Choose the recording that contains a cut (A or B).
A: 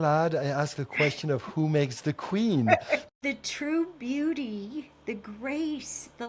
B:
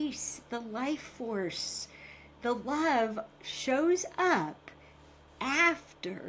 A